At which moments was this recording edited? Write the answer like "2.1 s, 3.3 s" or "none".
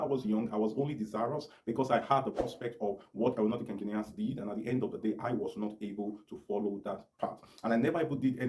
none